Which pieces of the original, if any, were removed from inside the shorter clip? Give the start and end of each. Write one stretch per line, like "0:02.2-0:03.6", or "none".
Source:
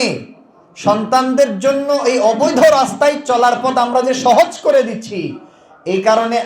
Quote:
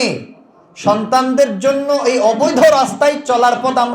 none